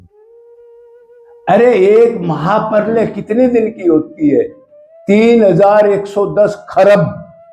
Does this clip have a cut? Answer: yes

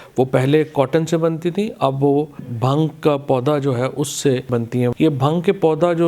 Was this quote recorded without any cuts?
no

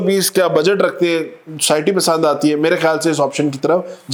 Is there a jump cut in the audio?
no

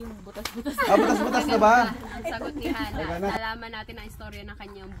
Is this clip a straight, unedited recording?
no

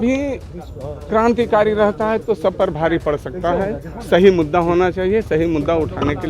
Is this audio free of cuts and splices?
yes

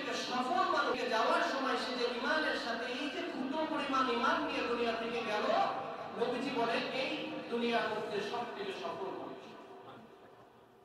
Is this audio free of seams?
no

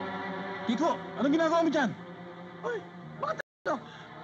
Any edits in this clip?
no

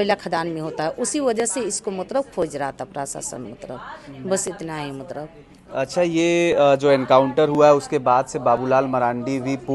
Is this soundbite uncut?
yes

